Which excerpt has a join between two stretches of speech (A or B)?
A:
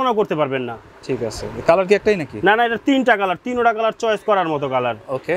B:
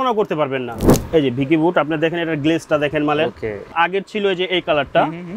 B